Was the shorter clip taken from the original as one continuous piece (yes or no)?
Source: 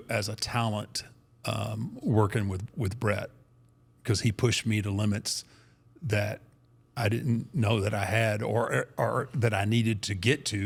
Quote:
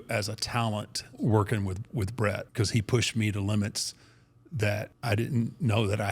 no